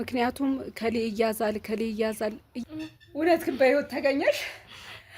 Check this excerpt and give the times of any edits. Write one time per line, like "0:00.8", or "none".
0:02.6